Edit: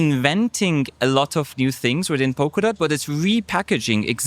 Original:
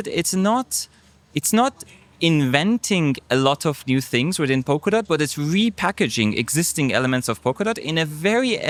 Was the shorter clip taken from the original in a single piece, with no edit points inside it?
yes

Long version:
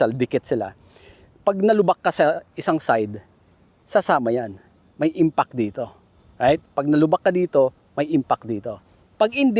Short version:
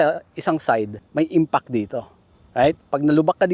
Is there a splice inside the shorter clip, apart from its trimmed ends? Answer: yes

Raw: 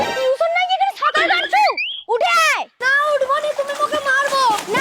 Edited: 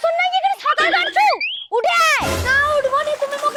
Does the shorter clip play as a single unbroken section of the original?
yes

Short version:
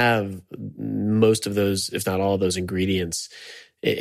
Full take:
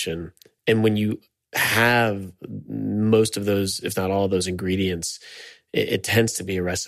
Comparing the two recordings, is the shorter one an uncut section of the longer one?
yes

